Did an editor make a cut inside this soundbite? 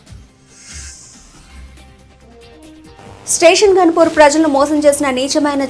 yes; 1 cut; at 3.2 s

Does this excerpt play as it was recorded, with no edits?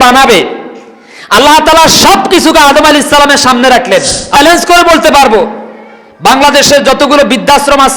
no; 1 cut; at 4.4 s

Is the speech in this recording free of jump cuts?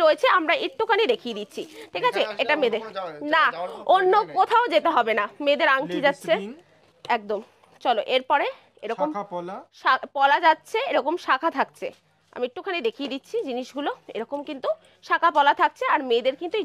yes; 0 cuts

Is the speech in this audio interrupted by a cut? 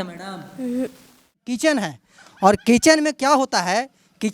yes; 1 cut; at 1.5 s

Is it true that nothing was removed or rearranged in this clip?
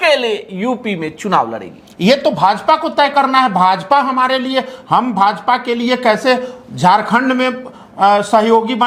yes; 0 cuts

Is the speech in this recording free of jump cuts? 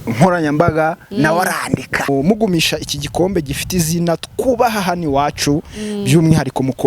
no; 1 cut; at 2.1 s

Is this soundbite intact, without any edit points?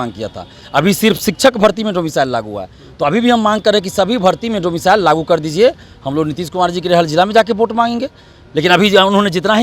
yes; 0 cuts

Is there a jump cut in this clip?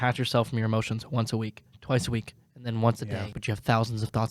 yes; 2 cuts; at 1.7 s, 3.3 s

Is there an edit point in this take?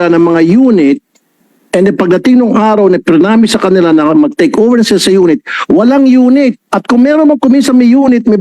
yes; 1 cut; at 6.7 s

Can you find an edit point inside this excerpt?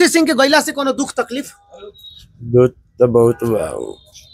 no; 0 cuts

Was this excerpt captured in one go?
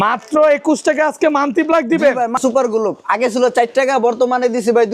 no; 1 cut; at 2.4 s

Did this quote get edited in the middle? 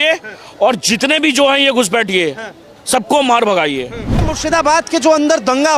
yes; 1 cut; at 4.2 s

